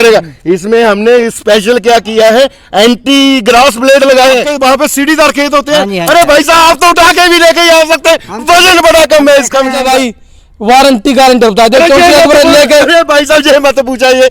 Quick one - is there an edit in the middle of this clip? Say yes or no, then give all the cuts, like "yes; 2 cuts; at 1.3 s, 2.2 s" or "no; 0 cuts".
yes; 2 cuts; at 4.5 s, 9.8 s